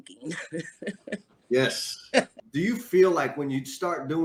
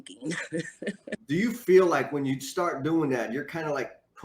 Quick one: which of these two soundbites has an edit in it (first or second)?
second